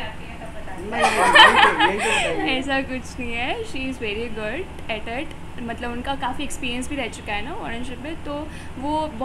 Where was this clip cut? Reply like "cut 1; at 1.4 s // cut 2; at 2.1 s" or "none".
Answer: none

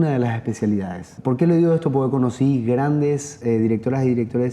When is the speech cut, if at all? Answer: cut 1; at 1.1 s // cut 2; at 3.4 s

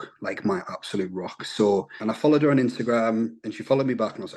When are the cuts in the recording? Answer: cut 1; at 1.9 s

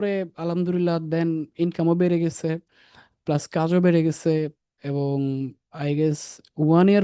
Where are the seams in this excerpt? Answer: none

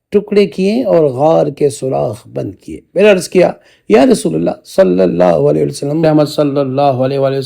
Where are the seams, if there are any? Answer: cut 1; at 6.0 s

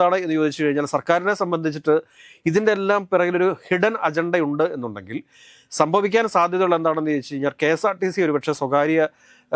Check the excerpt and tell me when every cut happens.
none

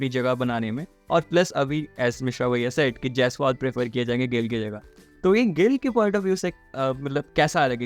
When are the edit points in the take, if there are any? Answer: none

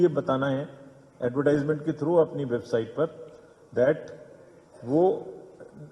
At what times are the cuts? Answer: none

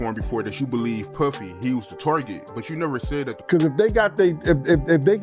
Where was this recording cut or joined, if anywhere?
cut 1; at 3.4 s

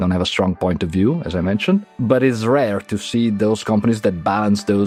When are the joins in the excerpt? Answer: none

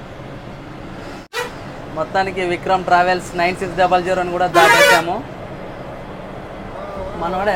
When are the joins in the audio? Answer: cut 1; at 1.4 s

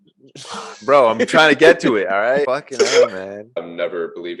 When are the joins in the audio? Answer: cut 1; at 2.5 s // cut 2; at 3.5 s

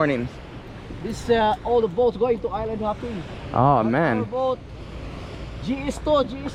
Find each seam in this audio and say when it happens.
none

